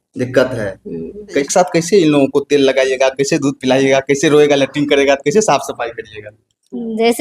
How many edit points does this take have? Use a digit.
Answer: 1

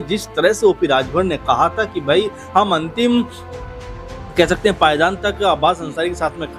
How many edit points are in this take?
0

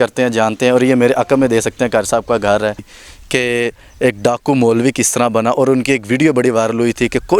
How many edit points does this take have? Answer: 1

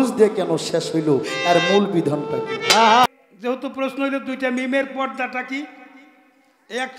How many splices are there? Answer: 1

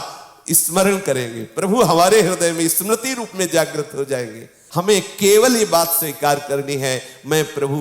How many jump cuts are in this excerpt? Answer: 1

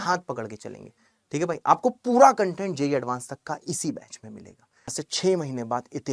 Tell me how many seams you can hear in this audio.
1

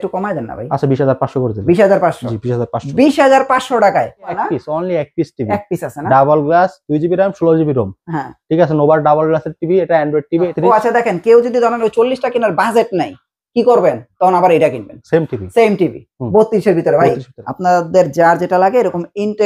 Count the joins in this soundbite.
3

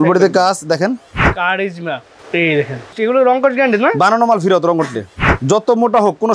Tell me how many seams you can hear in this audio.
3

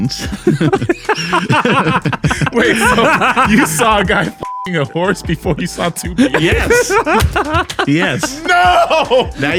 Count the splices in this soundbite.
0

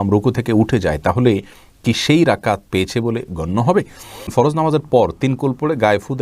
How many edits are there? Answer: 1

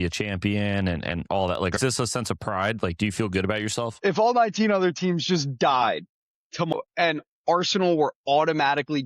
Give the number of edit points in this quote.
3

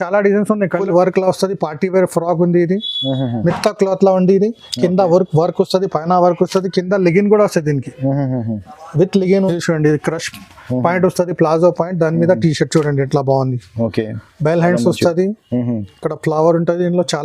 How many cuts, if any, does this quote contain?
2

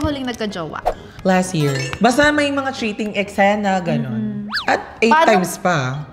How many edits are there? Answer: 2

